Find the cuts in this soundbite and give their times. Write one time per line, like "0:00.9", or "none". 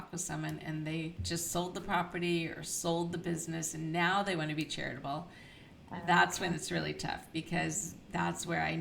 0:01.2